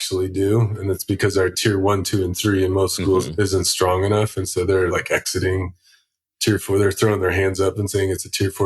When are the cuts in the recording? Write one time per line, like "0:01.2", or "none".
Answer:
0:03.2
0:04.9